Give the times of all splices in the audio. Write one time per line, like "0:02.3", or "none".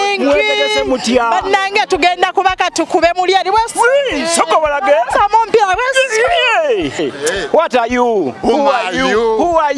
0:07.0